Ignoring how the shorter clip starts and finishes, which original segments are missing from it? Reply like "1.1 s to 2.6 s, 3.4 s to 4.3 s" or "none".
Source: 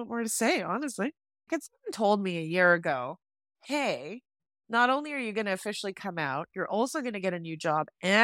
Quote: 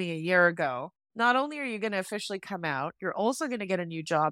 3.2 s to 4.5 s